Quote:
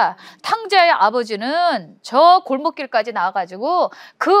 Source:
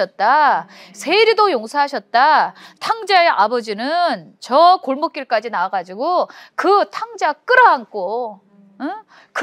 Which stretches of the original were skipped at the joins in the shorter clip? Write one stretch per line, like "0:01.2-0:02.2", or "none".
none